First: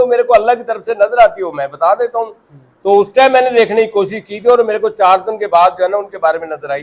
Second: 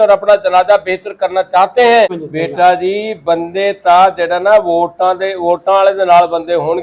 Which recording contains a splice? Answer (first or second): second